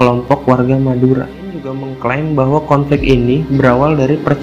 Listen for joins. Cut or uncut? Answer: cut